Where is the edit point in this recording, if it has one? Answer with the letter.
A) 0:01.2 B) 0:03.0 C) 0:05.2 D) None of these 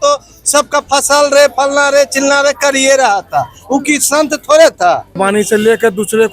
C